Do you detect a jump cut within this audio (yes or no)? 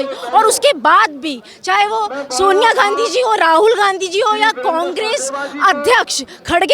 no